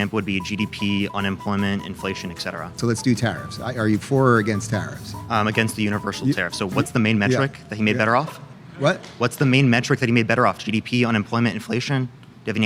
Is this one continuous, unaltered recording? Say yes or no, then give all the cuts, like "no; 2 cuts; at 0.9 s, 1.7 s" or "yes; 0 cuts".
no; 1 cut; at 2.6 s